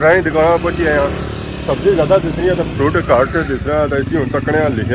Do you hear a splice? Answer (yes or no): no